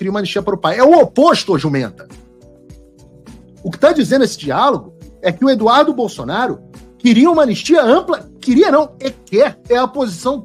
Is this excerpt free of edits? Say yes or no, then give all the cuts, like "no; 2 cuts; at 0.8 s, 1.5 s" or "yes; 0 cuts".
yes; 0 cuts